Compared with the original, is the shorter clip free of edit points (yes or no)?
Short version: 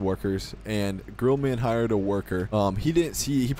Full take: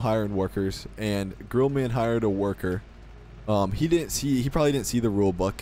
no